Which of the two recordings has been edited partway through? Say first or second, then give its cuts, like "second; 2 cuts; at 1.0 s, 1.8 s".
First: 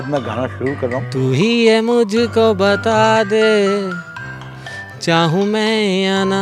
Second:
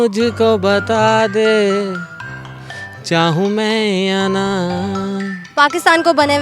second; 1 cut; at 5.4 s